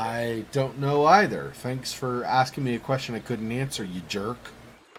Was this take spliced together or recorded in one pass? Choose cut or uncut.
uncut